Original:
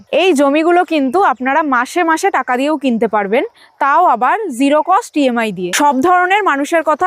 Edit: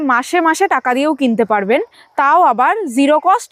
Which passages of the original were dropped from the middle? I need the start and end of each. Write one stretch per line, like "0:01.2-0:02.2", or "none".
none